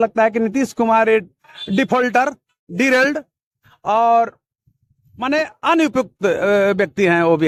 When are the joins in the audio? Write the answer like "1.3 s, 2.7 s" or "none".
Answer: none